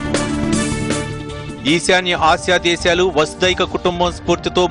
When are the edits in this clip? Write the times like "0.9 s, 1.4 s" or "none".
none